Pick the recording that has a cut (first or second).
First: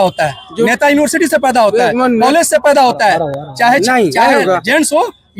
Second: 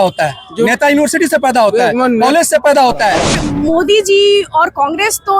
second